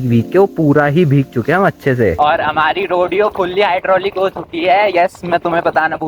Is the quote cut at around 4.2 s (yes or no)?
no